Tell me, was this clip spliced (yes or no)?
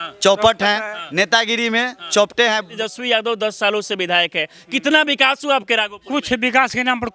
yes